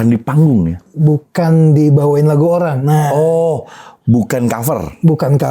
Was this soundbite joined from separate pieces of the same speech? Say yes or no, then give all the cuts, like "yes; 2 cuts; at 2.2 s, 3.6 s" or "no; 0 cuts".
no; 0 cuts